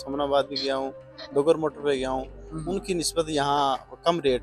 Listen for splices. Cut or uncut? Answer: uncut